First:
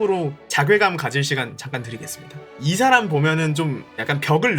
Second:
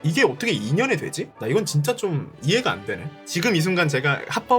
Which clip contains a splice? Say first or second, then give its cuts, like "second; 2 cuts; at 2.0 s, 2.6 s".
second; 1 cut; at 3.1 s